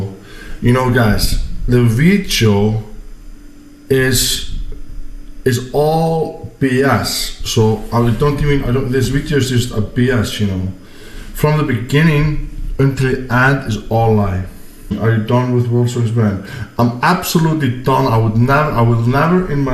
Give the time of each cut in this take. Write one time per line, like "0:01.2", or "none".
0:14.9

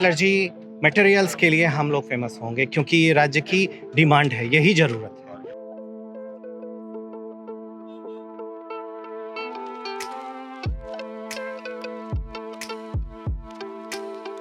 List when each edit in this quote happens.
none

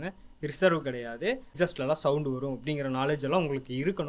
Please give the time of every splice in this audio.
0:01.5

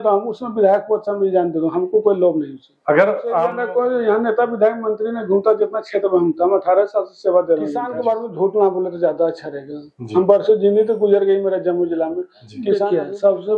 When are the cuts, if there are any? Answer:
0:03.5
0:07.9
0:12.8

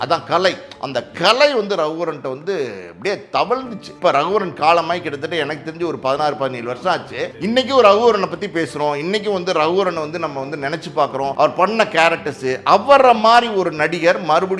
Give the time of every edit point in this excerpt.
0:03.8
0:07.3
0:11.3

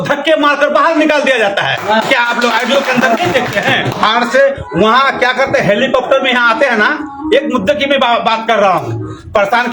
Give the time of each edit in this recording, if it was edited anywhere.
none

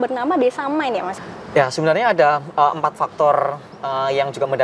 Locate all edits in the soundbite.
0:01.1

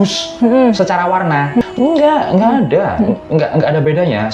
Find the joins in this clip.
0:01.6

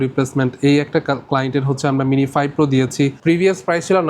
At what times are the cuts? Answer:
0:03.2

